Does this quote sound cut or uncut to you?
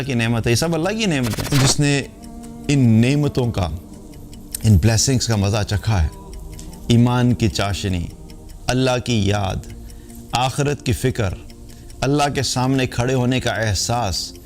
cut